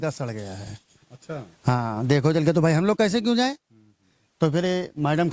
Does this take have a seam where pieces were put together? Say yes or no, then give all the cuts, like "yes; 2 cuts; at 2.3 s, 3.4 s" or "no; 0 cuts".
no; 0 cuts